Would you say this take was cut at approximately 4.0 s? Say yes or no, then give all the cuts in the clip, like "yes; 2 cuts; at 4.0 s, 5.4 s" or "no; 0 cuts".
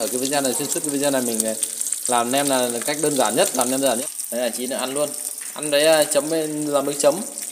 yes; 1 cut; at 4.0 s